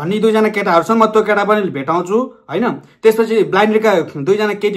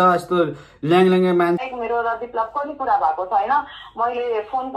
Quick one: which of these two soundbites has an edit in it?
second; 1 cut; at 1.6 s

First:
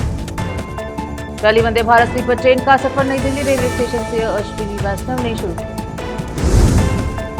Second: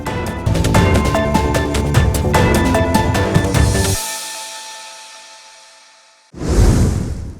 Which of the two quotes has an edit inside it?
second; 1 cut; at 6.2 s

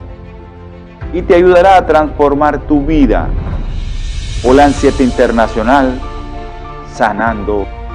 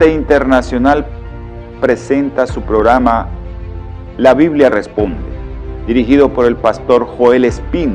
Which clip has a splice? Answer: second; 1 cut; at 2.1 s

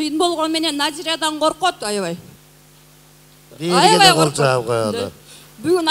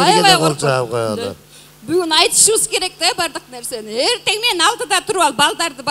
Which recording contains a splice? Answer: first; 1 cut; at 2.3 s

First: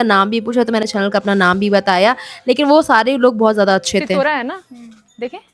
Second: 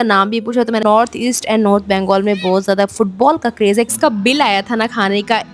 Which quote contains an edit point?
second; 2 cuts; at 0.8 s, 3.9 s

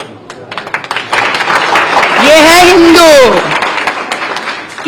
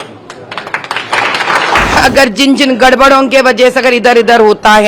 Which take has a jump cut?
second; 1 cut; at 2.0 s

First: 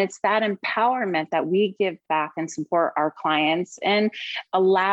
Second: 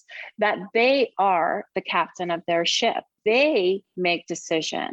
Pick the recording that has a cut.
second; 1 cut; at 3.1 s

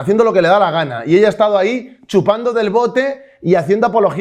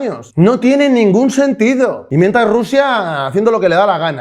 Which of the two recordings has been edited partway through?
second; 1 cut; at 2.0 s

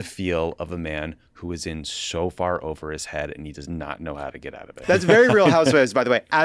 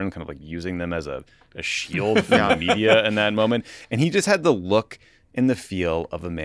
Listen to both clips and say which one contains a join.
first; 1 cut; at 4.8 s

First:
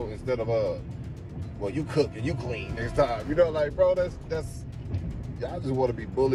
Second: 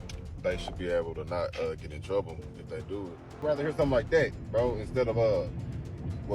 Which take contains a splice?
second; 1 cut; at 3.4 s

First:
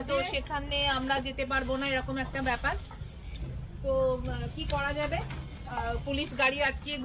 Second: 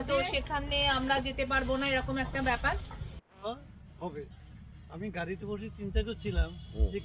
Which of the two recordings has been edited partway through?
second; 1 cut; at 3.3 s

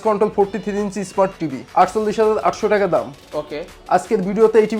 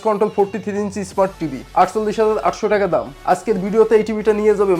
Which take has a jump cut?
second; 1 cut; at 3.1 s

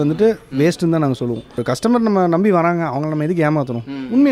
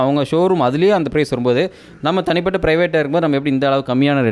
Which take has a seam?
first; 1 cut; at 1.6 s

